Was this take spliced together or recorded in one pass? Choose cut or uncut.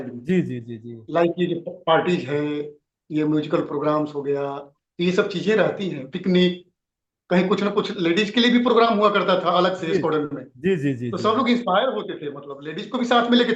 uncut